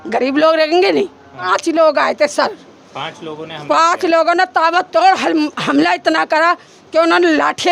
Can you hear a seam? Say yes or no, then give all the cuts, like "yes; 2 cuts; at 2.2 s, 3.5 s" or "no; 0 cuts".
yes; 1 cut; at 1.5 s